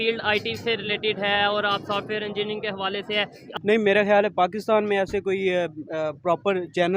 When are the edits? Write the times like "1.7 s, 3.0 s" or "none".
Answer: 3.4 s